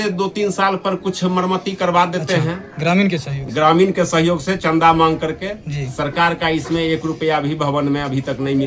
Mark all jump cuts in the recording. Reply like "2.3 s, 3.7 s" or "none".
none